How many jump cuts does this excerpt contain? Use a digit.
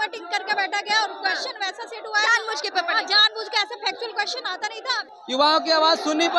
1